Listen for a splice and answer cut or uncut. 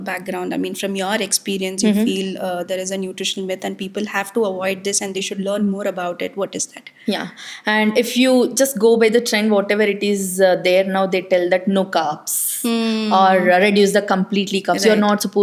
uncut